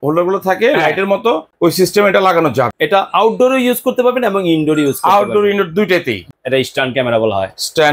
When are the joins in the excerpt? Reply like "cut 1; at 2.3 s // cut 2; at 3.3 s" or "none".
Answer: cut 1; at 1.5 s // cut 2; at 2.8 s // cut 3; at 6.2 s